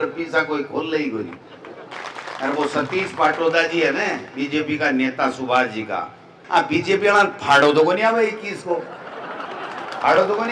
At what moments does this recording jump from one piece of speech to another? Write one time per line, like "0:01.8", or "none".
0:01.9
0:06.3